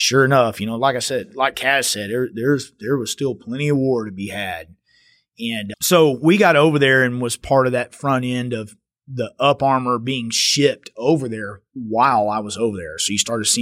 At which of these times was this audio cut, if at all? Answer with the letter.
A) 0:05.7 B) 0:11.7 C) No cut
A